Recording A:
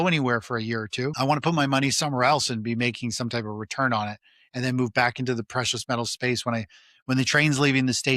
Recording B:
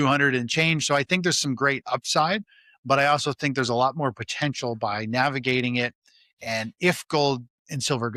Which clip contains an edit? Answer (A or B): A